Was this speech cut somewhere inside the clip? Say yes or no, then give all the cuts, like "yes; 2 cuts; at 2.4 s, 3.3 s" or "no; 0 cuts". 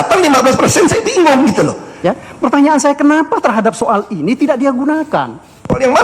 yes; 1 cut; at 1.9 s